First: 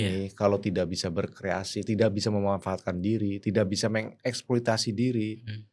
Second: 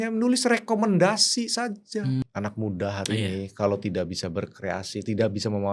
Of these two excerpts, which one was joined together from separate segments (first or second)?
second